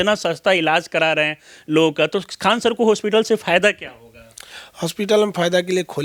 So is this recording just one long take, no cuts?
yes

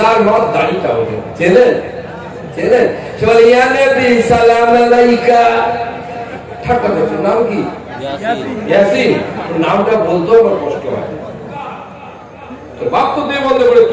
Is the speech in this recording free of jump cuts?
no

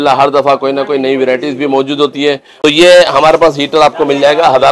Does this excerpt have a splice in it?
yes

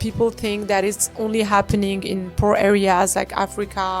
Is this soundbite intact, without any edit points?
yes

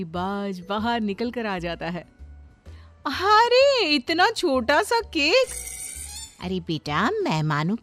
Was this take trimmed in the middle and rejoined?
no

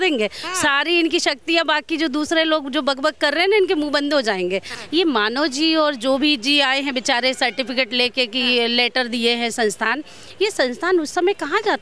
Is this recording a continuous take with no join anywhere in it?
no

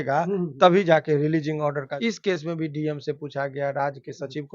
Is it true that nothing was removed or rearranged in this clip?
no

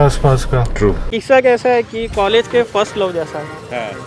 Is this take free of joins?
no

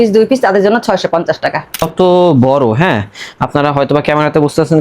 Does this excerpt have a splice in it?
yes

